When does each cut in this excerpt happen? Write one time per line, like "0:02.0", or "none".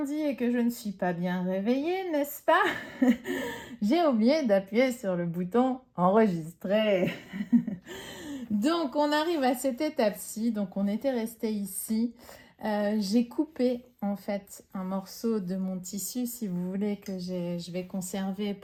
none